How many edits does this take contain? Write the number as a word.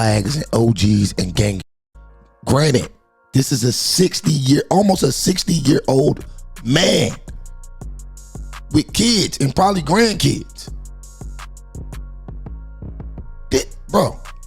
one